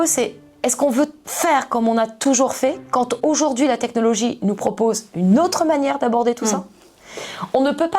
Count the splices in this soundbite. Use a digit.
1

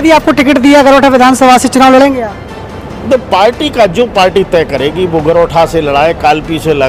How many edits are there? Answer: 0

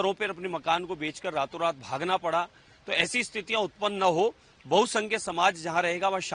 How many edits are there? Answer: 0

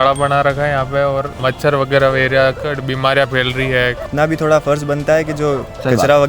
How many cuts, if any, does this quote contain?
2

